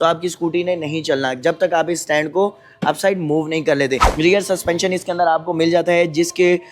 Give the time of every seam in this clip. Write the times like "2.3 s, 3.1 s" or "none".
4.1 s